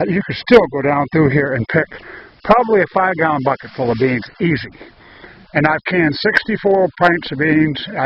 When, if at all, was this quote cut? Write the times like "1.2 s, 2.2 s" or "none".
1.1 s